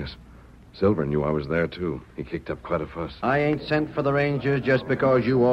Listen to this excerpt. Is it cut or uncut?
cut